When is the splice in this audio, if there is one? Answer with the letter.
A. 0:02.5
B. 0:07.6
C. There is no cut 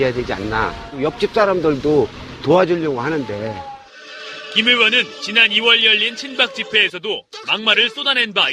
B